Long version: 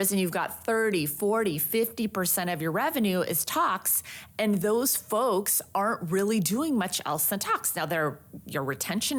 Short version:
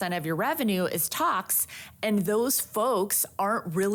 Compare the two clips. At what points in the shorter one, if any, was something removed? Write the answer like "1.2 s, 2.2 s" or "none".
none